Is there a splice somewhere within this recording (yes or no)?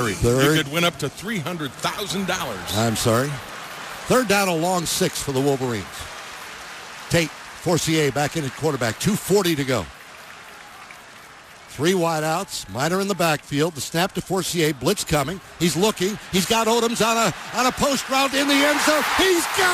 no